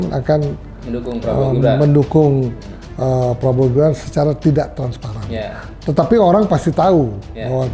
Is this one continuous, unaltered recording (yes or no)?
yes